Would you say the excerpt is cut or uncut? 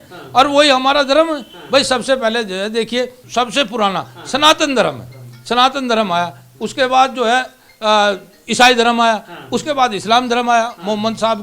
uncut